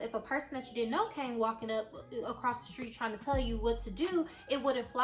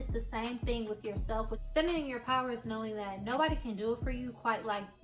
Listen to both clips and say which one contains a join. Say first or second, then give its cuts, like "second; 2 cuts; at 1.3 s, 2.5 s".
second; 1 cut; at 1.6 s